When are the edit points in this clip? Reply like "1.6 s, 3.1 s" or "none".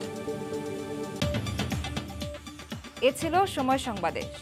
none